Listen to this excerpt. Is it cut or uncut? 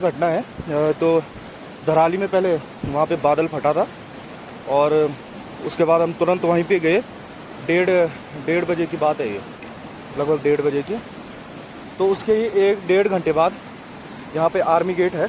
cut